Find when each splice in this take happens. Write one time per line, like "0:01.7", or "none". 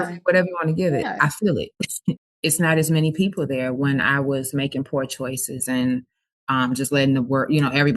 0:02.3